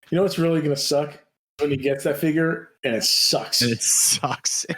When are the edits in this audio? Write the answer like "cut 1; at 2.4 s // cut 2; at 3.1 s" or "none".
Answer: cut 1; at 1.6 s // cut 2; at 2.7 s